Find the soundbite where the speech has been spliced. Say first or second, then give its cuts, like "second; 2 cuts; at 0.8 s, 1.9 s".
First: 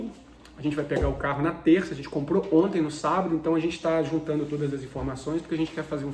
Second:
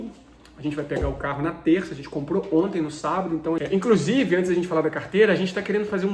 second; 1 cut; at 3.6 s